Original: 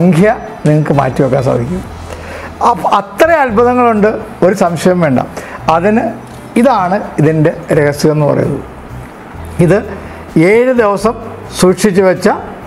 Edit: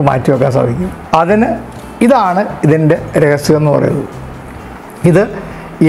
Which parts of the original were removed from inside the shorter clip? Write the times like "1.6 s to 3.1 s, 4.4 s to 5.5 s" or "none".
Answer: 1.8 s to 5.5 s